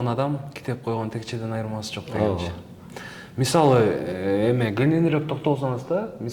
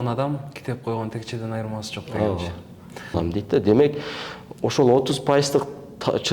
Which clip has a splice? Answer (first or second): second